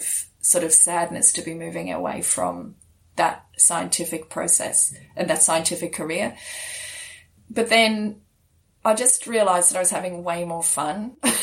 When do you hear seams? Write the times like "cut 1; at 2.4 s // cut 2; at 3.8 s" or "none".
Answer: cut 1; at 7.4 s